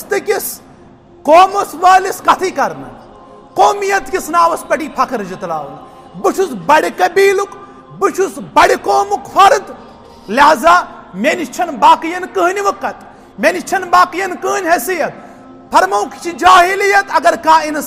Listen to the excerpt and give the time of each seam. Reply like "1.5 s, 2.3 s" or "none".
none